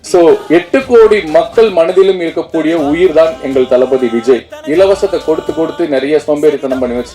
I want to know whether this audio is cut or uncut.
cut